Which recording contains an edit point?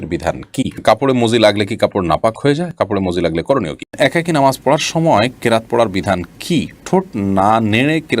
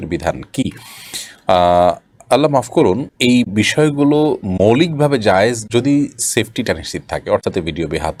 first; 2 cuts; at 0.8 s, 3.9 s

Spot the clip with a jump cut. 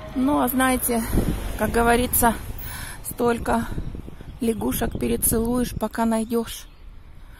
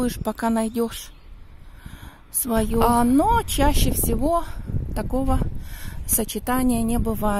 second; 1 cut; at 2.8 s

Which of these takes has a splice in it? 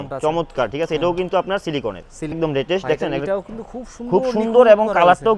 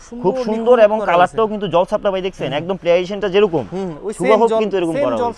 first; 1 cut; at 2.4 s

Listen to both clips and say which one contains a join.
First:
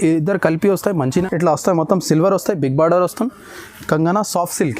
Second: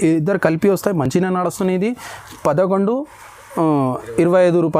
first; 1 cut; at 1.1 s

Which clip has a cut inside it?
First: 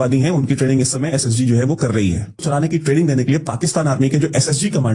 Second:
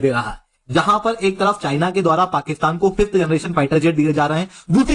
first; 1 cut; at 2.4 s

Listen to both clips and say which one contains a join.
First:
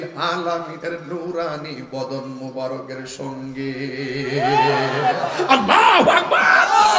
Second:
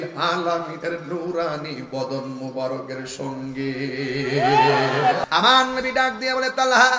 second; 1 cut; at 5.2 s

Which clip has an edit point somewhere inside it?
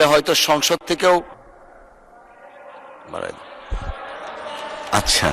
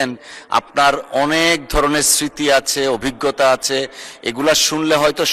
first; 1 cut; at 1.3 s

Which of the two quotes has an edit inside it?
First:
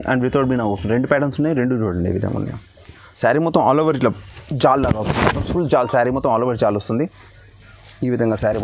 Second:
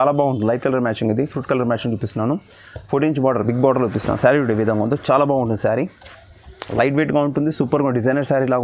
first; 1 cut; at 6.9 s

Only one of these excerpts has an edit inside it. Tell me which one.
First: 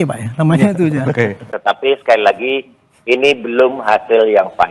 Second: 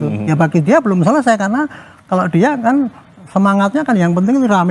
first; 1 cut; at 1.5 s

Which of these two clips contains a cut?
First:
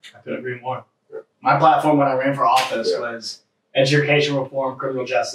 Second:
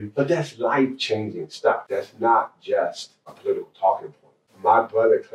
second; 3 cuts; at 1.9 s, 3.4 s, 4.5 s

